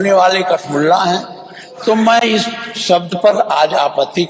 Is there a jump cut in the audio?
no; 0 cuts

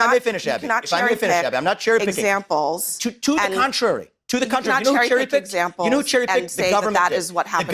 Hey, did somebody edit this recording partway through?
no; 0 cuts

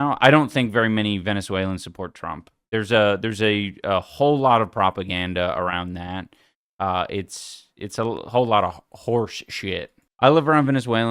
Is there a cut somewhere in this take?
yes; 1 cut; at 10.0 s

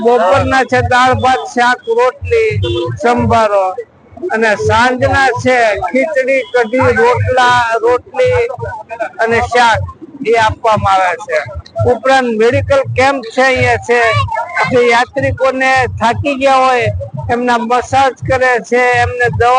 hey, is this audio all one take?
yes; 0 cuts

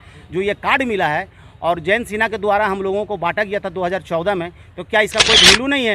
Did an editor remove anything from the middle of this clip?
no; 0 cuts

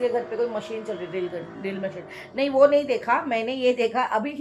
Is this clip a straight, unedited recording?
yes; 0 cuts

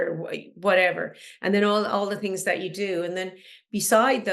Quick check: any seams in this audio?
no; 0 cuts

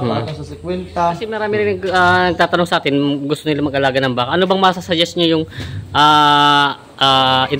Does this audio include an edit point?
yes; 1 cut; at 1.4 s

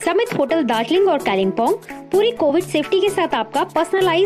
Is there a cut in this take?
no; 0 cuts

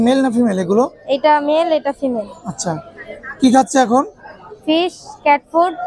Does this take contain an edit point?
no; 0 cuts

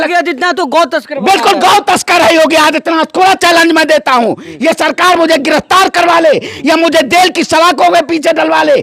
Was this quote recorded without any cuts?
yes; 0 cuts

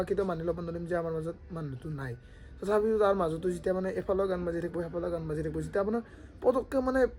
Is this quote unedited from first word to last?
yes; 0 cuts

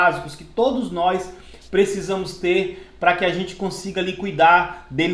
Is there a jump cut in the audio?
no; 0 cuts

